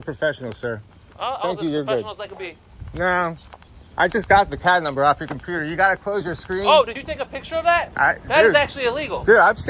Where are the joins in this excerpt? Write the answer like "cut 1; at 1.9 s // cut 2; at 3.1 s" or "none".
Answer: none